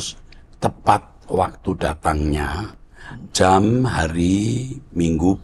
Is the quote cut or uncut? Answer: uncut